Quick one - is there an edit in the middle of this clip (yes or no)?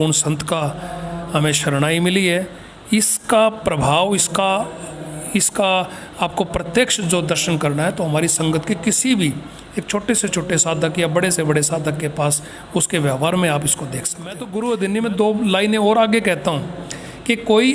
no